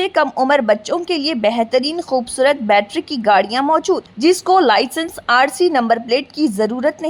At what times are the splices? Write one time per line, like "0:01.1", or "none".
none